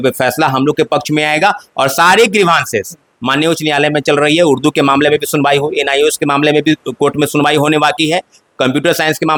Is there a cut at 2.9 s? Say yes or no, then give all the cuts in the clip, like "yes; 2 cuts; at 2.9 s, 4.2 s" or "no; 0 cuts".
no; 0 cuts